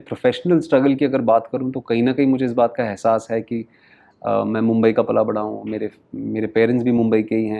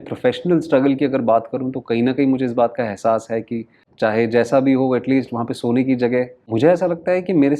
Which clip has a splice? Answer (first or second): second